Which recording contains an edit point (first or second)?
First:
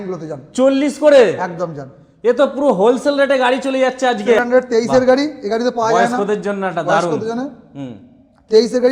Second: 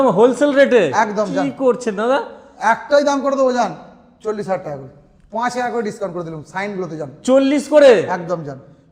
first